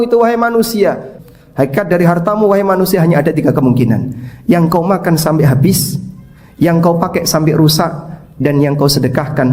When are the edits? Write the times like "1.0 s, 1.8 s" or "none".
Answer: 1.1 s